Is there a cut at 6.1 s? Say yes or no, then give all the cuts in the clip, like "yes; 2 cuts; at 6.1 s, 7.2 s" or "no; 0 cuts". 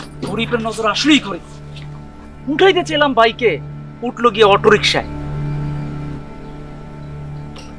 yes; 1 cut; at 6.1 s